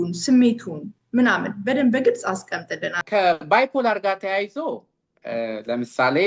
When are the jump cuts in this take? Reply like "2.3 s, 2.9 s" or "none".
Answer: 3.1 s

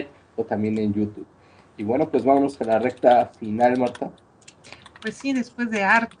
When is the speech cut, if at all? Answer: 2.0 s

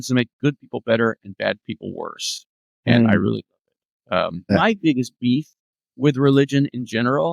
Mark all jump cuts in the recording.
4.5 s

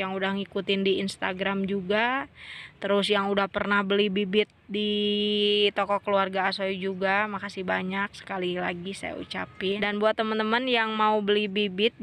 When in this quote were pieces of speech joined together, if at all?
9.8 s

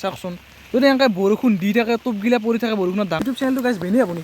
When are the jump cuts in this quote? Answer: 3.2 s

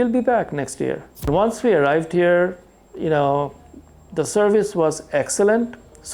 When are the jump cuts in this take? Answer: 1.3 s

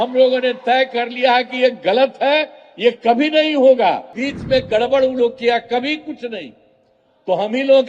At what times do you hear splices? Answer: 4.2 s

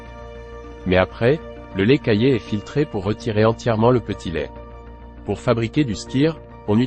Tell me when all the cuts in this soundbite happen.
5.0 s

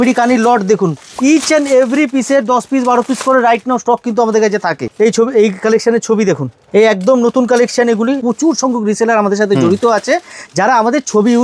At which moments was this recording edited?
1.0 s, 4.8 s, 6.5 s, 8.2 s

